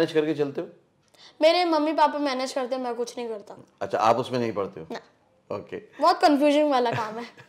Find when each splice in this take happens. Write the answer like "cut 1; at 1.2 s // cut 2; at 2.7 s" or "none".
none